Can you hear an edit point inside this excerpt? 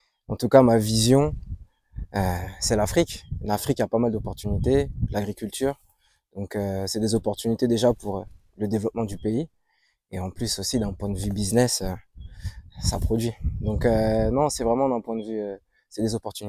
no; 0 cuts

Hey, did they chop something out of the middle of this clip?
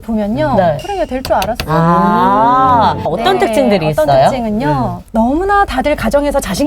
yes; 2 cuts; at 3.1 s, 5.0 s

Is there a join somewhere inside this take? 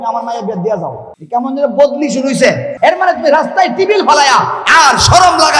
yes; 2 cuts; at 1.1 s, 2.7 s

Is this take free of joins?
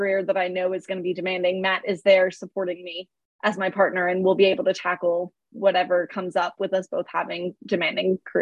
yes; 0 cuts

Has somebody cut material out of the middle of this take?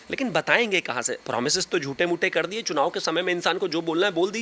yes; 1 cut; at 1.1 s

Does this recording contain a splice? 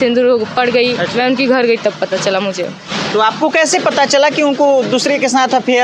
no; 0 cuts

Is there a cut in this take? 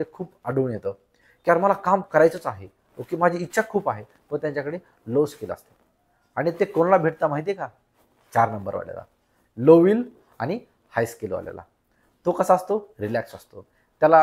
no; 0 cuts

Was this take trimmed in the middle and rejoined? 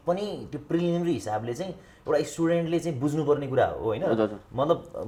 no; 0 cuts

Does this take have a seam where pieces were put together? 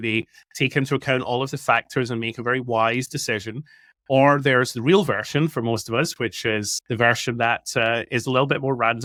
no; 0 cuts

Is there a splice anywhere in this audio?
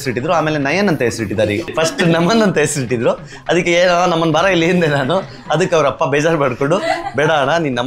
yes; 1 cut; at 1.7 s

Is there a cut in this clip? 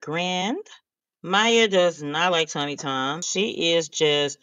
yes; 1 cut; at 3.3 s

